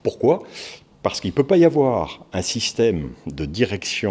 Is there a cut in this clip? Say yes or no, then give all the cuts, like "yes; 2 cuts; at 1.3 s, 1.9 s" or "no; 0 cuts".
no; 0 cuts